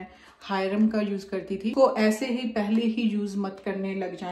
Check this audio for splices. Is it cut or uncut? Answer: cut